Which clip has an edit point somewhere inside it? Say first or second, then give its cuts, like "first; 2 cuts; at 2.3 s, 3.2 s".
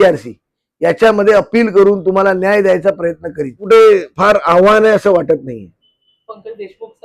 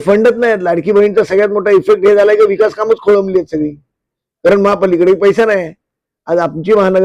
first; 1 cut; at 3.6 s